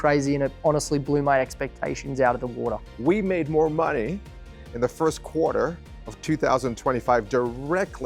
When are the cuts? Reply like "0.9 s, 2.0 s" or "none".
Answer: 2.9 s